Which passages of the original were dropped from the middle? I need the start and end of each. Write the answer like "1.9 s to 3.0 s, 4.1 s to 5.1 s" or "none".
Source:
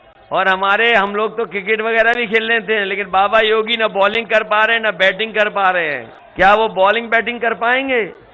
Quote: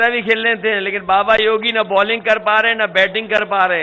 none

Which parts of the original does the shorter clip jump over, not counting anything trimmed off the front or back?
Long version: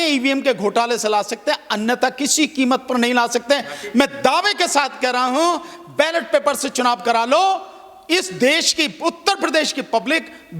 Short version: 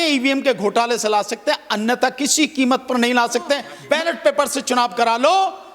3.7 s to 5.8 s

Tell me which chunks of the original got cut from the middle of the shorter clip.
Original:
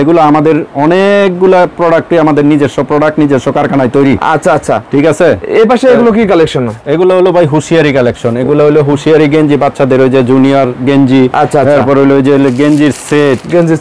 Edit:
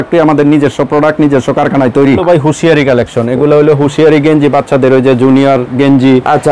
4.2 s to 7.3 s

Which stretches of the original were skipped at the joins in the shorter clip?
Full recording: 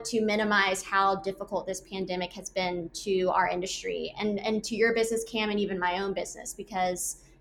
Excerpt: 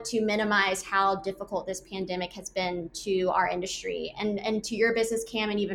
none

